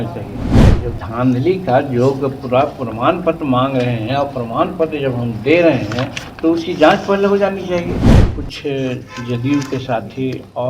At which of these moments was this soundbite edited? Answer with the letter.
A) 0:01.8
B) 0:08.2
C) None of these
B